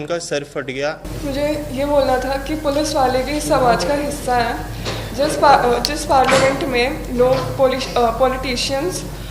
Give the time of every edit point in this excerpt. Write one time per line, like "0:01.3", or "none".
none